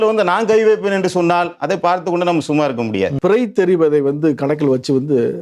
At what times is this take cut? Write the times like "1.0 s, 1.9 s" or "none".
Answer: 3.2 s